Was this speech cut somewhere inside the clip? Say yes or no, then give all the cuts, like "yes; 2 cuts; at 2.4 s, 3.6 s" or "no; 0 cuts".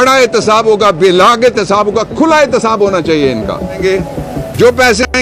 yes; 1 cut; at 3.8 s